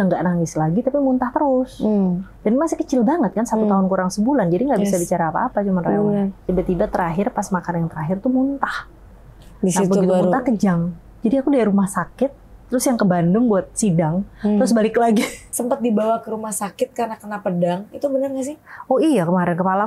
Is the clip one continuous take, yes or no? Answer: no